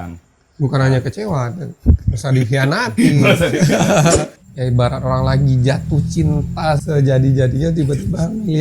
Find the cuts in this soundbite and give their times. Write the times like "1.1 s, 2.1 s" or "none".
4.1 s, 6.8 s